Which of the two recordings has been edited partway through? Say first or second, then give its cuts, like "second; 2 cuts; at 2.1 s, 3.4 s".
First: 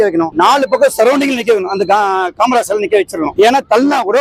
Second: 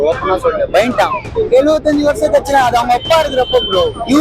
second; 1 cut; at 1.3 s